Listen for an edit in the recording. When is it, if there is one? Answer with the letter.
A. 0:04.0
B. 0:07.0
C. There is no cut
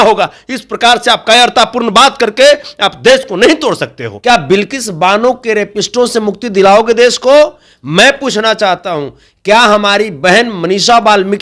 A